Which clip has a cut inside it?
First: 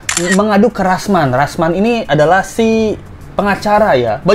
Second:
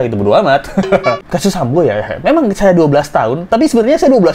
second; 1 cut; at 1.3 s

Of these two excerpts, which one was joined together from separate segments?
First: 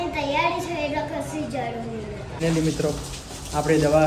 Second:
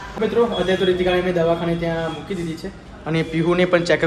first; 1 cut; at 2.4 s

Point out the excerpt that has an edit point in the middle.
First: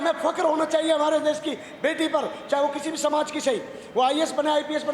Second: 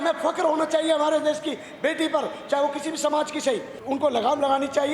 second; 1 cut; at 3.7 s

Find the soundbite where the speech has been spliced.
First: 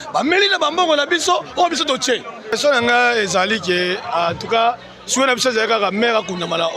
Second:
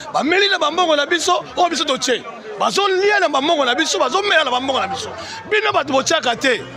first; 1 cut; at 2.6 s

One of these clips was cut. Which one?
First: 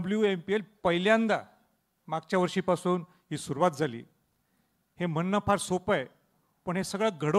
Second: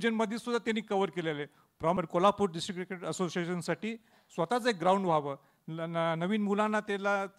second; 1 cut; at 1.9 s

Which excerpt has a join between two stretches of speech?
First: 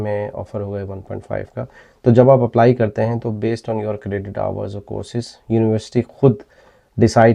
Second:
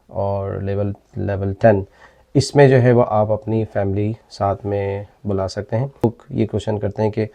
second; 1 cut; at 6.0 s

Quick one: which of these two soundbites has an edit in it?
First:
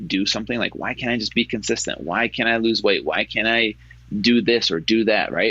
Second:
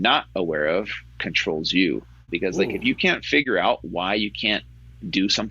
second; 1 cut; at 2.2 s

